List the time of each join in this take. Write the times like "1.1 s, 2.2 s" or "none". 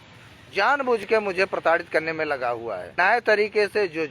2.9 s